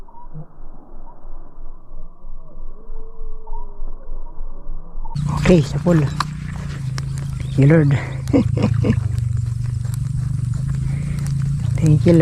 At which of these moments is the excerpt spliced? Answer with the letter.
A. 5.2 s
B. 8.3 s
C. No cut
A